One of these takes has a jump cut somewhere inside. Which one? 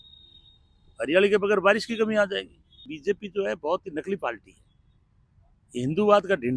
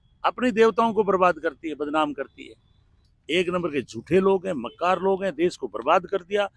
first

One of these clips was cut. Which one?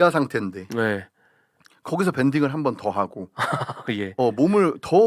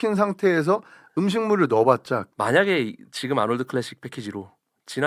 second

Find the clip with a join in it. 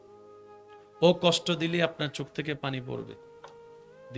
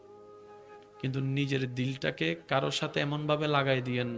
first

